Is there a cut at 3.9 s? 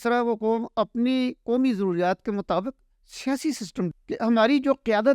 yes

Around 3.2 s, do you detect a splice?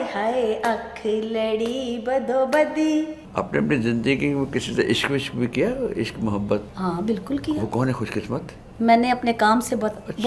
yes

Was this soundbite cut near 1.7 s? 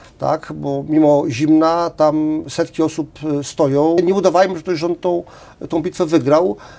no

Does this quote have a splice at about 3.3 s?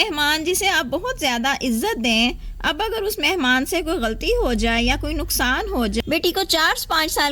no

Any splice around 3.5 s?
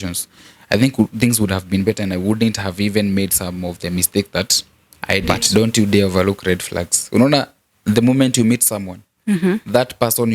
no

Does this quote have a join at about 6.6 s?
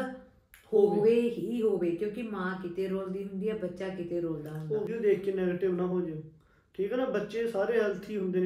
no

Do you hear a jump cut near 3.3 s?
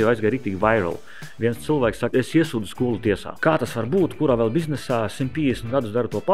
yes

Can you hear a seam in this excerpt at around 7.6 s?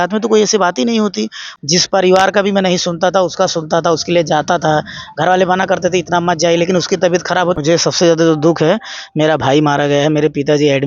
yes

